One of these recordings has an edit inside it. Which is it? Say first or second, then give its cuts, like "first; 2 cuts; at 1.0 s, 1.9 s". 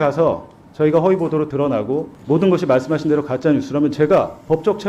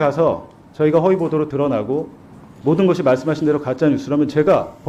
first; 1 cut; at 2.1 s